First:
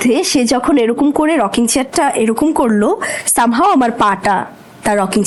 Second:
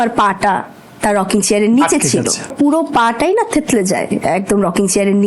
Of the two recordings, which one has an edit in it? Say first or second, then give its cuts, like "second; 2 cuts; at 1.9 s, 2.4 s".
second; 1 cut; at 2.5 s